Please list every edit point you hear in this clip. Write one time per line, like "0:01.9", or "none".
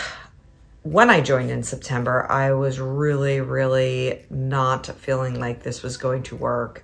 none